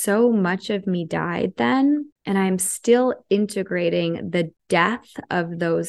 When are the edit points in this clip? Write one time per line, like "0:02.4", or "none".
0:02.1
0:04.6